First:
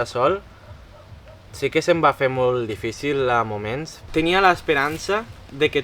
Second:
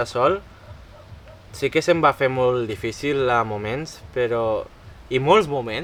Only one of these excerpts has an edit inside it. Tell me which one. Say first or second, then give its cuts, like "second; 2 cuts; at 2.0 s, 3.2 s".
first; 1 cut; at 4.1 s